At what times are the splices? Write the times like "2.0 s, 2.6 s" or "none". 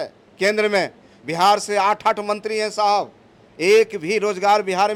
none